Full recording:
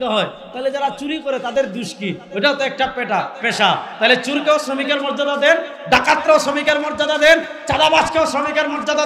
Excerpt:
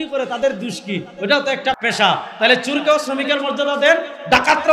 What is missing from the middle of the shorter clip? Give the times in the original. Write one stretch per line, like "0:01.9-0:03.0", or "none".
0:02.9-0:03.4